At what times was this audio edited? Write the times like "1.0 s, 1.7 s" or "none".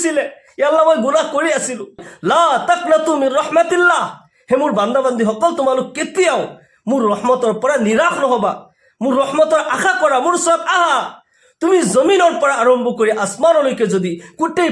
2.1 s

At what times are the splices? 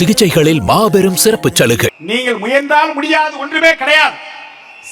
2.0 s

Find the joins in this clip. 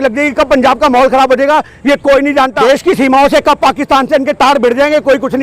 2.5 s

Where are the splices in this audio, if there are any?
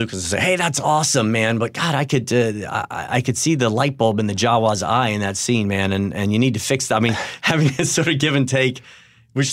none

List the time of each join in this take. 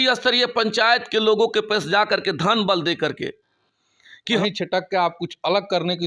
4.4 s

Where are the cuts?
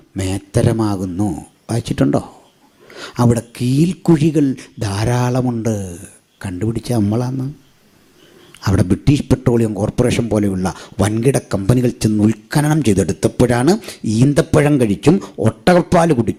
none

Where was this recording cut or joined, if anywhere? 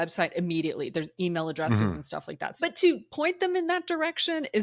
2.5 s

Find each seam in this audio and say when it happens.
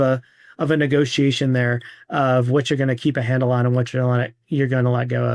none

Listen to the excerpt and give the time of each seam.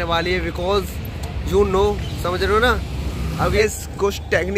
3.6 s

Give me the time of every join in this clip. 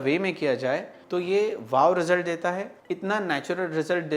0.9 s, 2.7 s

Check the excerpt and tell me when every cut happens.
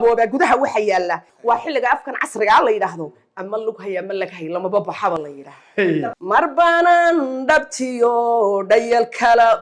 1.3 s, 6.0 s

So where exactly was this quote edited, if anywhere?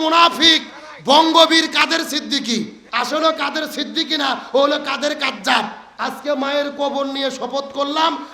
2.8 s, 5.8 s

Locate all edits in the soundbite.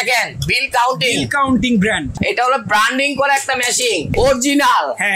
2.2 s, 4.1 s

